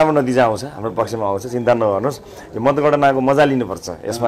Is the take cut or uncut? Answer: uncut